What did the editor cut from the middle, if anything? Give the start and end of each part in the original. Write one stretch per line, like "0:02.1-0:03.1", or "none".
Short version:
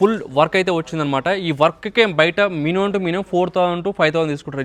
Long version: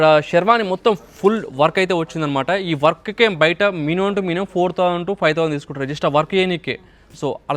none

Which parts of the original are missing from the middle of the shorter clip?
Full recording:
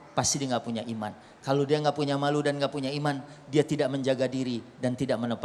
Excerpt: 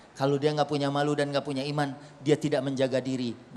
none

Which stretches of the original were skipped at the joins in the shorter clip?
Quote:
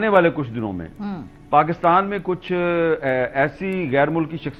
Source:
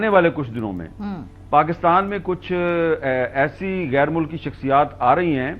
none

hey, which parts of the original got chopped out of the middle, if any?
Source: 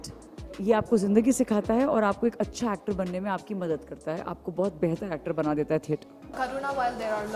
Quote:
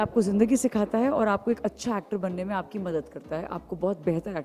none

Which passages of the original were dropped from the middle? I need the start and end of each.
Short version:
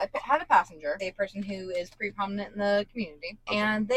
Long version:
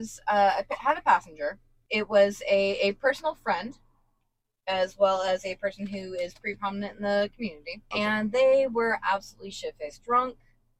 0:01.6-0:05.5

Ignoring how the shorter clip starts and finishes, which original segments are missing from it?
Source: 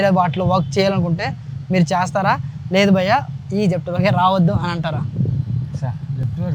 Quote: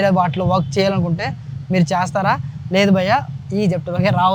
none

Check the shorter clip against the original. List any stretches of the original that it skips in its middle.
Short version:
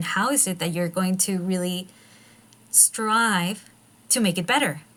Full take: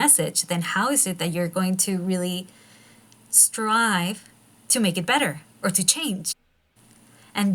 none

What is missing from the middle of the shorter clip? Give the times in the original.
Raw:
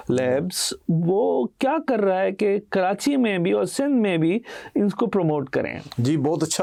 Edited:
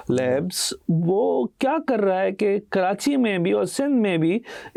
none

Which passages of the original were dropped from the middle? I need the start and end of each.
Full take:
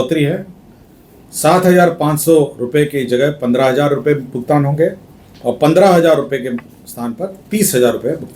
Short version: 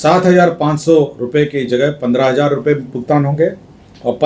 none

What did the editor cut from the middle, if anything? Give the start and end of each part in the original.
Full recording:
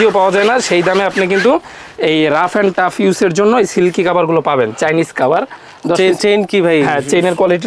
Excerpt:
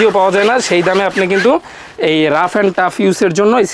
none

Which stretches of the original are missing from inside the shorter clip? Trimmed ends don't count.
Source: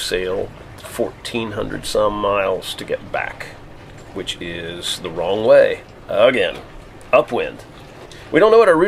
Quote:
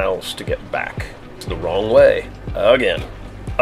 0:03.7-0:04.9

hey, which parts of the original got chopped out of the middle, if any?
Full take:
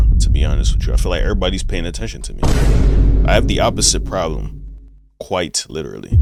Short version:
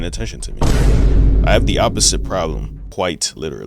0:04.6-0:05.1

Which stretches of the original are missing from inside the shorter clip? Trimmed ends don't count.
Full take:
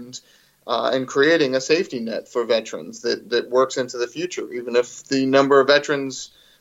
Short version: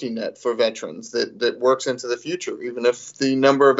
none

